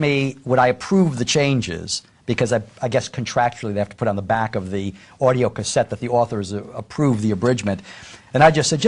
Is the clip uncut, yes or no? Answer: no